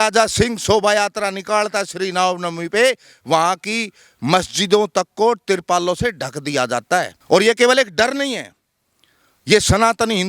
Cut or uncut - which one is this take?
cut